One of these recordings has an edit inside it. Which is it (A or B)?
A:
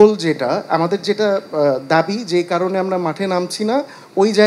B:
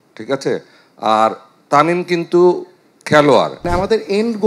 B